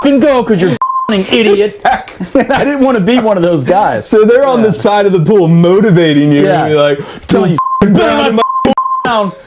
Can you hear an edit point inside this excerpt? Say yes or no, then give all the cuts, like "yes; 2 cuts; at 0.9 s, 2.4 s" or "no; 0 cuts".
no; 0 cuts